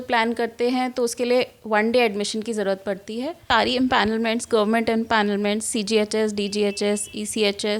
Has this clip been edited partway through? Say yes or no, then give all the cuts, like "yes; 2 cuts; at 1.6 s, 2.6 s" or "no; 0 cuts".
yes; 1 cut; at 3.4 s